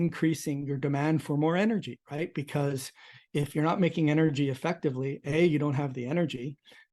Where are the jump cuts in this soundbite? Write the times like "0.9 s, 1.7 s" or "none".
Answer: none